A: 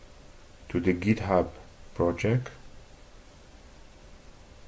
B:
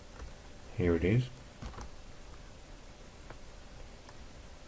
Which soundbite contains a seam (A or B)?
A